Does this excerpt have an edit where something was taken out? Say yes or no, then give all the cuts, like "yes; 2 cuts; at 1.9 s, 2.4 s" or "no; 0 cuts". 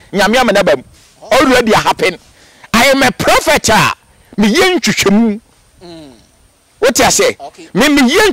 no; 0 cuts